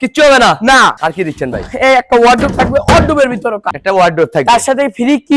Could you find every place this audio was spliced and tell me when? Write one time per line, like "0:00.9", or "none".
0:03.7